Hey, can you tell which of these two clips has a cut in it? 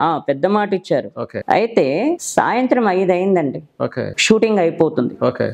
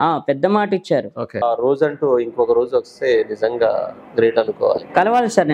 second; 1 cut; at 1.4 s

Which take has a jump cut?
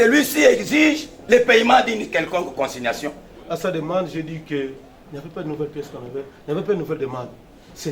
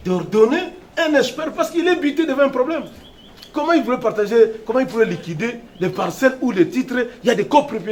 first; 1 cut; at 3.3 s

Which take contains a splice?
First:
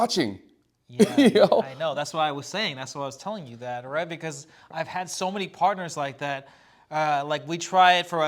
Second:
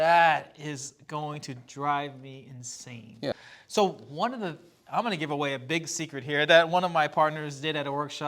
second; 1 cut; at 3.3 s

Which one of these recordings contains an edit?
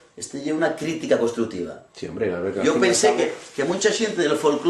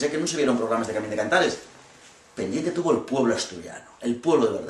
first; 1 cut; at 1.7 s

